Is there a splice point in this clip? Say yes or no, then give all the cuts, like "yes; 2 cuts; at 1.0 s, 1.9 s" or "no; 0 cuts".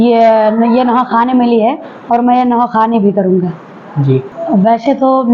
yes; 1 cut; at 4.3 s